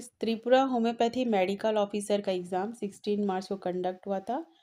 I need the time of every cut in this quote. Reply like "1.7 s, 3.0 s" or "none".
none